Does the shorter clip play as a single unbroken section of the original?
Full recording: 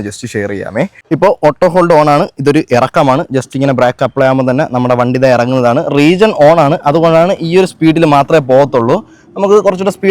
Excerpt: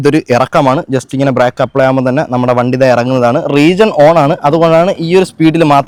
yes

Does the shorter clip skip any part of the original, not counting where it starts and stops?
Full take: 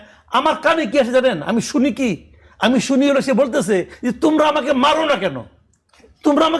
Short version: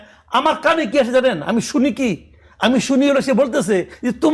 no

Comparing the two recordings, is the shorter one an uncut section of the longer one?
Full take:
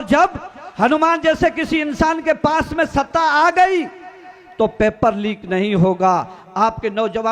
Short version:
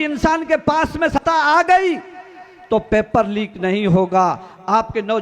no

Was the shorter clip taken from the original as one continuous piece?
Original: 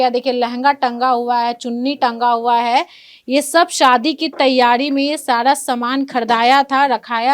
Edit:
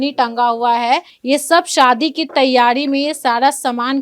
no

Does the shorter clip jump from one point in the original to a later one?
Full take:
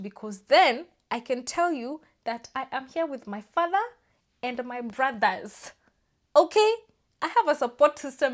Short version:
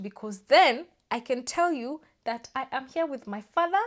no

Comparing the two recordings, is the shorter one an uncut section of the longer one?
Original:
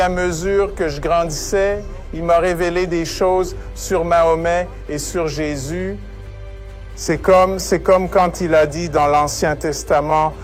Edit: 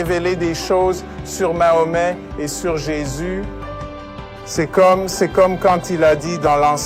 yes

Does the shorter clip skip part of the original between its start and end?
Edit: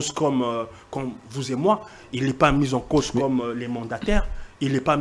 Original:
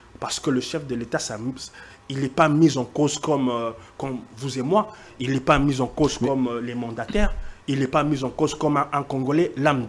no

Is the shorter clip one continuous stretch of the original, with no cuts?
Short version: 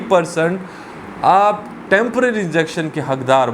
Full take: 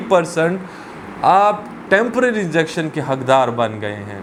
yes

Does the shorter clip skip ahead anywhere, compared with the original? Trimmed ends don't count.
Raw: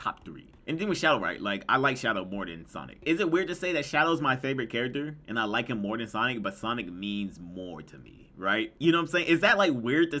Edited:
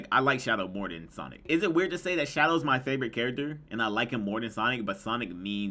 no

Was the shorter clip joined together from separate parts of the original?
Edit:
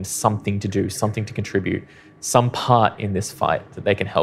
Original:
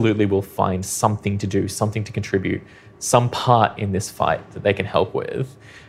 no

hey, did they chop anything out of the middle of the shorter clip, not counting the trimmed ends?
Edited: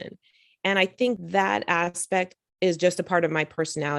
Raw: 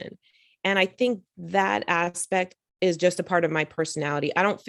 yes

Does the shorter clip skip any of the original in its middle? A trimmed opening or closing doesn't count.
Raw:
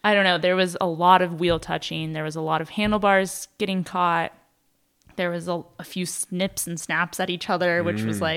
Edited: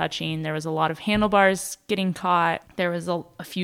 yes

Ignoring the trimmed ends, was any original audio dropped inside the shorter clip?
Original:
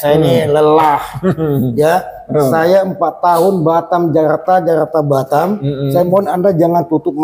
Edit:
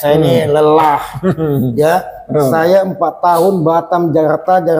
no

